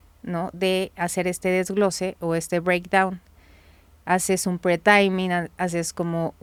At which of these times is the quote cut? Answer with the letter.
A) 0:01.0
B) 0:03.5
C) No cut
C